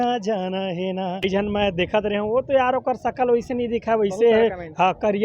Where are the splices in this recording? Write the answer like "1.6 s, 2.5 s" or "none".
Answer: 1.2 s